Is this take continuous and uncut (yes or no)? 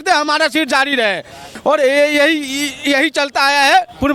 no